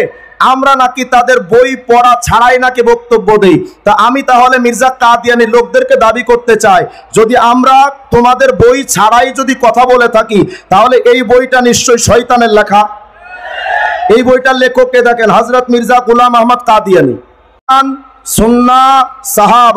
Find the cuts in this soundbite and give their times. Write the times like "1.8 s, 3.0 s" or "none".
17.7 s